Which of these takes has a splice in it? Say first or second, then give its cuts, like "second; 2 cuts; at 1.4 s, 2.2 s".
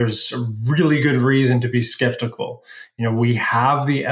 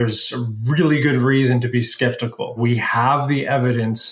second; 1 cut; at 2.6 s